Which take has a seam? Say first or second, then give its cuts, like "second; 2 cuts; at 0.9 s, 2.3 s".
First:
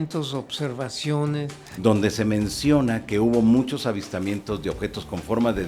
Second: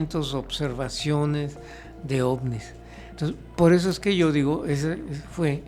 first; 1 cut; at 1.6 s